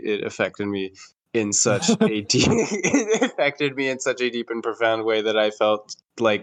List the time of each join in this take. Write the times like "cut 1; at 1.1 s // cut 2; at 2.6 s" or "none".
none